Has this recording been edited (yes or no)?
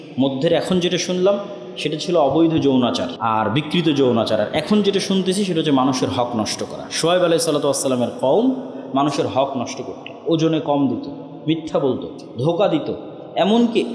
yes